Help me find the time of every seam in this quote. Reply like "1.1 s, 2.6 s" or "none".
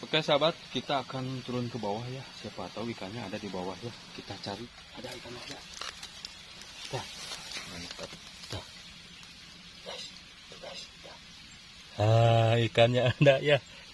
4.6 s